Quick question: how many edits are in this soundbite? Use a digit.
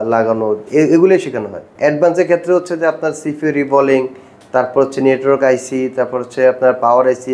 1